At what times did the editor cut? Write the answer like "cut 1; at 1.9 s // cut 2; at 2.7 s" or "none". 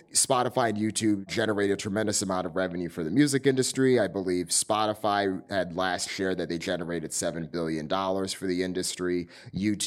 cut 1; at 1.3 s